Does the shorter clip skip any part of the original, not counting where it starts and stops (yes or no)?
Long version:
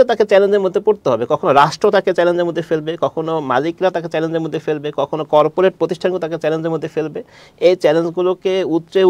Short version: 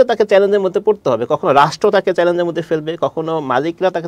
no